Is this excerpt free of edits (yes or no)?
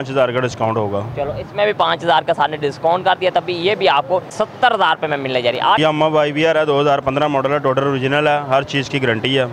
no